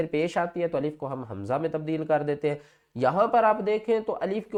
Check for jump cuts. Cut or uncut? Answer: uncut